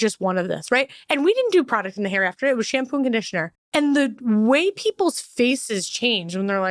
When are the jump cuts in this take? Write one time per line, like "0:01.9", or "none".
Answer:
0:03.6